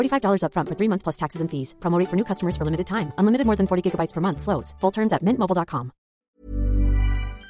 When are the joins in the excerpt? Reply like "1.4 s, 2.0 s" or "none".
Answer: 6.2 s